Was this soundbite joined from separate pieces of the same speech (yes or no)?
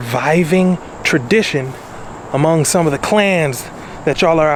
no